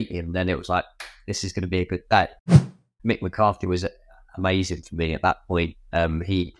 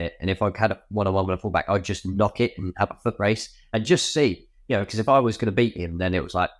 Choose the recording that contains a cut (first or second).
first